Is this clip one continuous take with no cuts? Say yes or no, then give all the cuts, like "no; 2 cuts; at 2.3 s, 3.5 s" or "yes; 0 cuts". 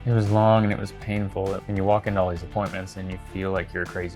no; 1 cut; at 1.6 s